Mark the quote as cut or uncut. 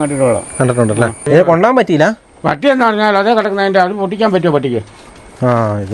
cut